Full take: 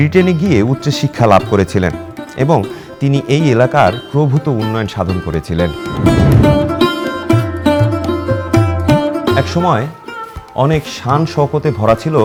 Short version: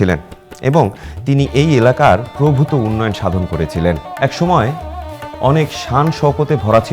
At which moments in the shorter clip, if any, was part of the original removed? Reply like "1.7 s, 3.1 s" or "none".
4.2 s